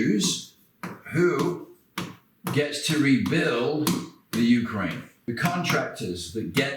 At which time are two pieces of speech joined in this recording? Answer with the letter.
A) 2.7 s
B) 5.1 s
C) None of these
B